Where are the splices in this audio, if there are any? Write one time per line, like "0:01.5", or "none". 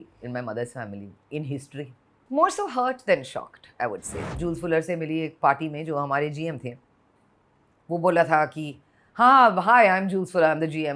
0:02.1
0:04.1